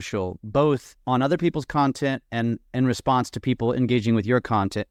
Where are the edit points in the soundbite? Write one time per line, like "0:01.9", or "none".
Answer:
none

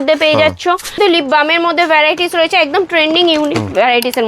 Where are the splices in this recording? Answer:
0:01.0

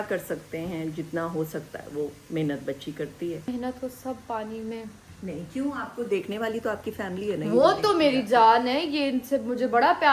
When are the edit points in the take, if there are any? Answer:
0:03.5
0:05.0

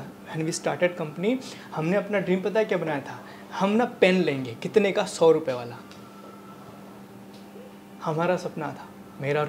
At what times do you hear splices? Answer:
none

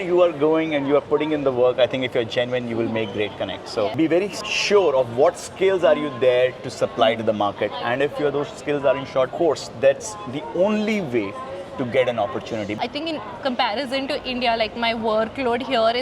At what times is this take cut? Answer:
0:03.9
0:12.8

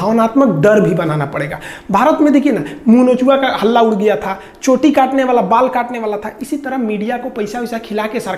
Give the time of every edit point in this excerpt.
none

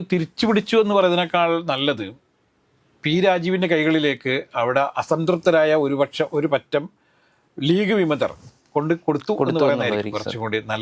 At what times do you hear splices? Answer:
none

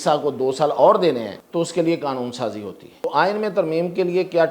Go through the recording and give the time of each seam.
0:01.4
0:03.0

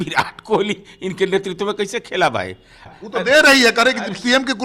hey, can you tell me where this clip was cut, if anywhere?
0:02.9

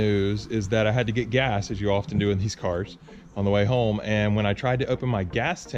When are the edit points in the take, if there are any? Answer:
none

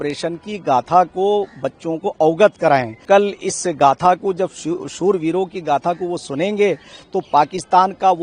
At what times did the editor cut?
0:03.0

